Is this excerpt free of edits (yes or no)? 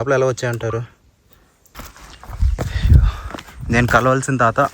no